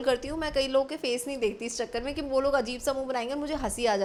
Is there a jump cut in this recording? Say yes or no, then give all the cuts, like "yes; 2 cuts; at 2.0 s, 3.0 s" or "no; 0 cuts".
no; 0 cuts